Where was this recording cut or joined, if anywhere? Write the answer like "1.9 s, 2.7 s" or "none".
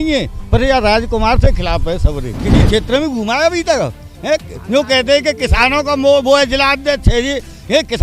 2.3 s